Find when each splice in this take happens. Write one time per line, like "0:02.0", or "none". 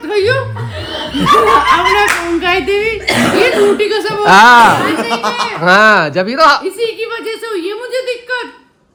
none